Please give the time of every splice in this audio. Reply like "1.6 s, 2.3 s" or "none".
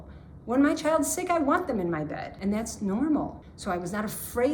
2.2 s, 3.5 s